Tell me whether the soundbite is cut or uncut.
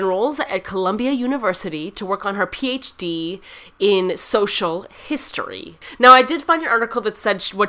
uncut